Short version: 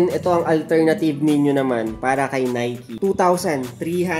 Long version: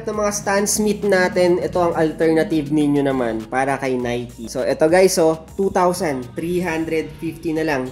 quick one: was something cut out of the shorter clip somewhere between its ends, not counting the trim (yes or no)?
yes